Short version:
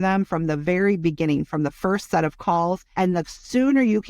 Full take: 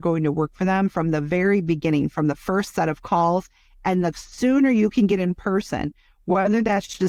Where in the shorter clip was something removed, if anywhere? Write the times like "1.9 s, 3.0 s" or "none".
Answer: 2.8 s